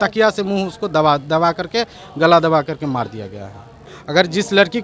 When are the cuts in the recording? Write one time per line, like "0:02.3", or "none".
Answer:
0:03.9